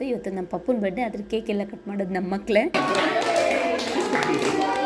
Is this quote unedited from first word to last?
no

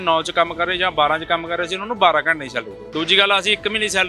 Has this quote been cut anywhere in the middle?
yes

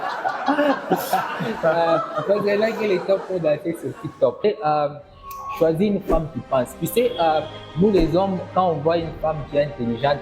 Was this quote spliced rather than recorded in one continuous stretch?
yes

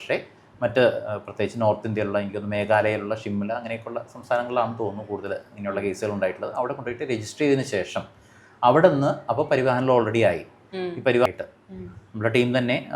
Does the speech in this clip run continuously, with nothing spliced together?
no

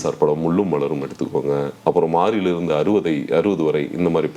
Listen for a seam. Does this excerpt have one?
no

